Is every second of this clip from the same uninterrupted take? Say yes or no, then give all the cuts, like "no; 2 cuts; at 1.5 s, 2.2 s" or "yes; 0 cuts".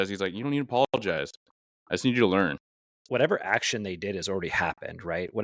no; 1 cut; at 2.7 s